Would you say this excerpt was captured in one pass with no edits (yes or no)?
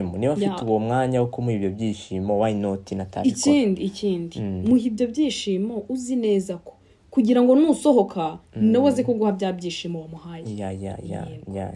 yes